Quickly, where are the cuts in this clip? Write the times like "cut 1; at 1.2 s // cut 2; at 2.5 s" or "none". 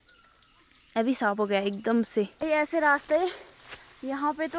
cut 1; at 2.4 s